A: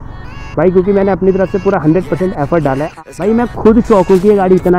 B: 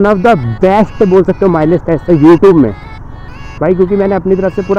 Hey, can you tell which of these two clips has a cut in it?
A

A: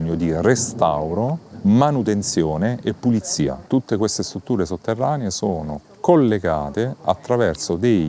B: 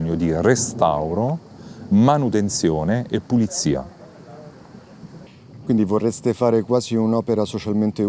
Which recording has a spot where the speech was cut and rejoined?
A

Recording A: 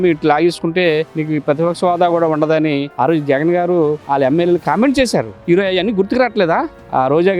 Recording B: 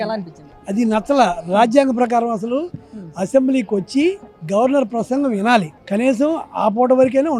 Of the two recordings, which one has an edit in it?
A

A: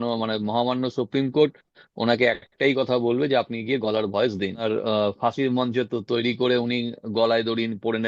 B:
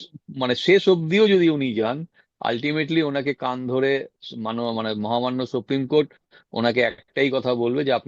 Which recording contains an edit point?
A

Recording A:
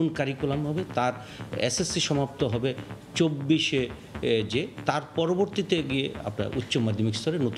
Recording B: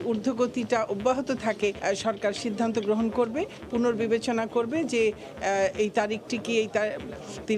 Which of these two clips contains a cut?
B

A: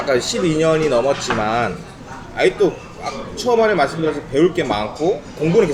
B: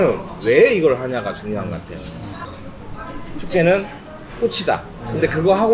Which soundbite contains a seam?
B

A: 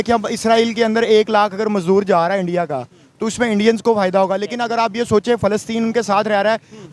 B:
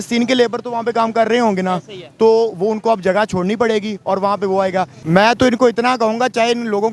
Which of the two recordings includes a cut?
B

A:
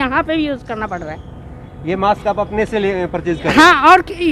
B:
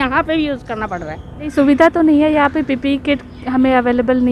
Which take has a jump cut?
B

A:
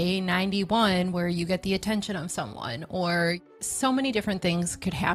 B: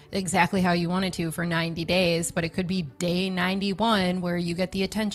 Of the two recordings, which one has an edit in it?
A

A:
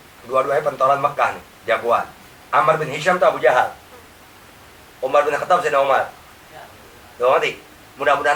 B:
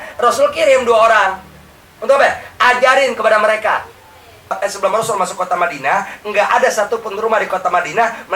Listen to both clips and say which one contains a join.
B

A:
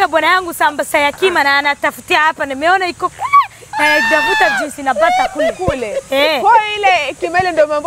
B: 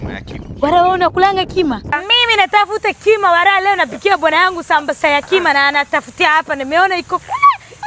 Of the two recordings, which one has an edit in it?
B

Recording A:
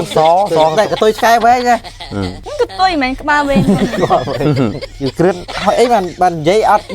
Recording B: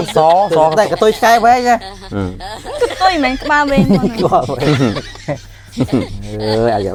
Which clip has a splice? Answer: A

